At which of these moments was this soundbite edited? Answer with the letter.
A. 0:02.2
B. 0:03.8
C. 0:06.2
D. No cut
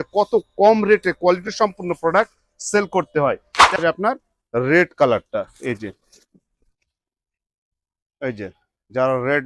B